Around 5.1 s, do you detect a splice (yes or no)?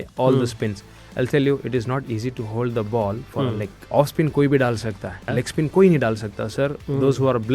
yes